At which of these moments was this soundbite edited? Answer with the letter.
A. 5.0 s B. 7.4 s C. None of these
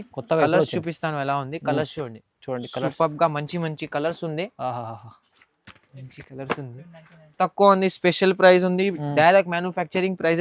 B